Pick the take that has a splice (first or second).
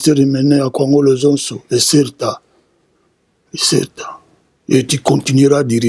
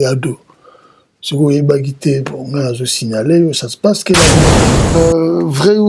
second